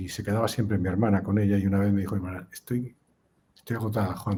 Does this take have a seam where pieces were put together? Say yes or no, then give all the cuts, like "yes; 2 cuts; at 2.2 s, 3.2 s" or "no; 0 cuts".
no; 0 cuts